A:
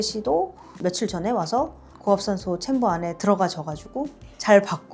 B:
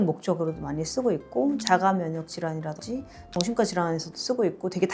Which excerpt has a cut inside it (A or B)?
B